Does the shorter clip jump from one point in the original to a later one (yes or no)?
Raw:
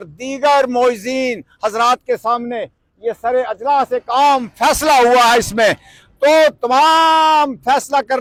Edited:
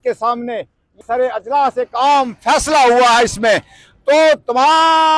yes